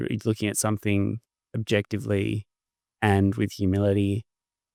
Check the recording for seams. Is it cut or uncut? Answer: uncut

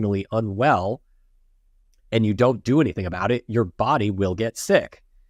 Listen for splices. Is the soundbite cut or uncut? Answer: uncut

